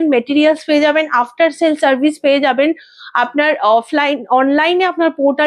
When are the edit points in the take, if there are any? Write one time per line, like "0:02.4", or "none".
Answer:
none